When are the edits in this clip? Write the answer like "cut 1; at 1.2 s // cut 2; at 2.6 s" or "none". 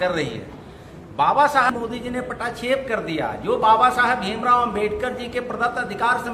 cut 1; at 1.7 s